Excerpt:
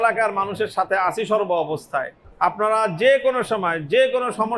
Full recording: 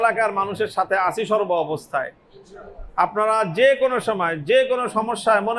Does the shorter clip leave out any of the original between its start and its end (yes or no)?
yes